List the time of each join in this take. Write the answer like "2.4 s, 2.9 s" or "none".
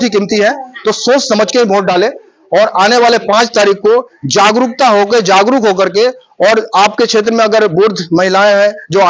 none